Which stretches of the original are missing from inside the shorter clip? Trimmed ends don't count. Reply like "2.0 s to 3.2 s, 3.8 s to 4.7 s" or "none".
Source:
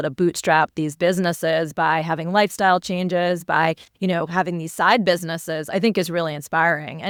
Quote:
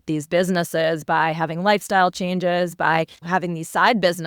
3.9 s to 4.3 s